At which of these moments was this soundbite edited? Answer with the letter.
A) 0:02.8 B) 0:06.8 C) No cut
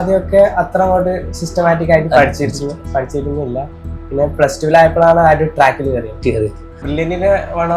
B